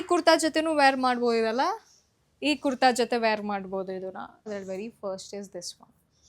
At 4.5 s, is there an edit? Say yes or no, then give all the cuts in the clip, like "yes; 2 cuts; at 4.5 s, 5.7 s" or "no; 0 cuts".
yes; 1 cut; at 4.5 s